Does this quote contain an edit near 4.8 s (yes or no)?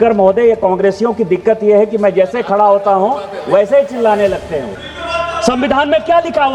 yes